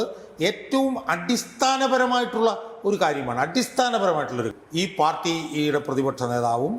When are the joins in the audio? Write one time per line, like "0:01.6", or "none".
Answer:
0:04.5